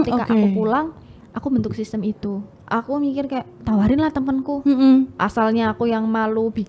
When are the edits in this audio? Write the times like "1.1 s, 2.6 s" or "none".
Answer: 2.5 s